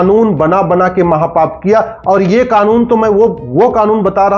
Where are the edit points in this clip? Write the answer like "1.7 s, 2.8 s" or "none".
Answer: none